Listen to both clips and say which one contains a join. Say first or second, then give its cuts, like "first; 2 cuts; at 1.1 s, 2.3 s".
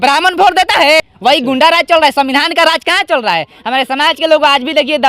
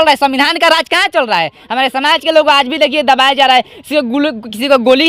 first; 1 cut; at 1.0 s